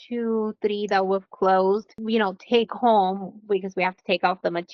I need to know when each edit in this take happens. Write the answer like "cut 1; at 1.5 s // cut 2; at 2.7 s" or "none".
cut 1; at 1.9 s